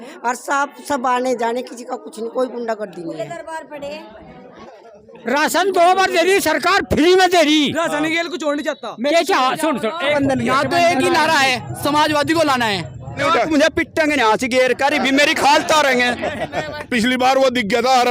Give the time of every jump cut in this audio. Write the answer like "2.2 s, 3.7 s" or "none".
4.5 s, 10.1 s, 13.2 s, 16.8 s